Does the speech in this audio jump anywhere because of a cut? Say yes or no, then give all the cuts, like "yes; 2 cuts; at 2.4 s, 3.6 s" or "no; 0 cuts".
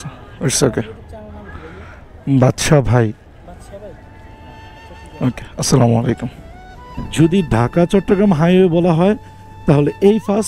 yes; 1 cut; at 7.0 s